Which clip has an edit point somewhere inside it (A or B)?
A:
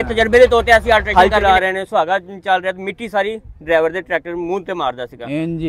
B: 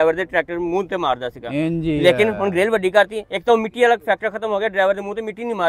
A